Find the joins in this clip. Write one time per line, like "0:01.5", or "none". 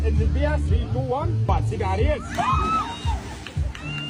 none